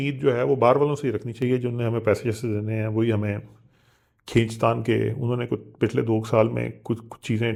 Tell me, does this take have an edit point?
no; 0 cuts

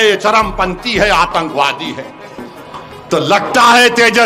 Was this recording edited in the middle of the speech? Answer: no; 0 cuts

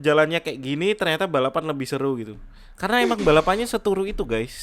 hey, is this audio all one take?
yes; 0 cuts

